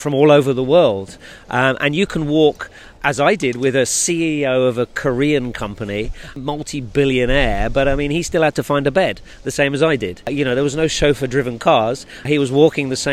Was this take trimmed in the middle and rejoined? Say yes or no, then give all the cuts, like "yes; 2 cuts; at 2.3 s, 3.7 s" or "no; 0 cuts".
yes; 3 cuts; at 6.3 s, 10.3 s, 12.3 s